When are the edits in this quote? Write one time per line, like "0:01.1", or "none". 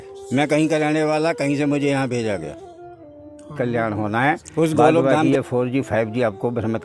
0:05.3